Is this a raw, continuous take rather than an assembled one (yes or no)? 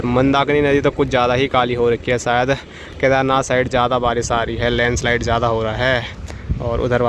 yes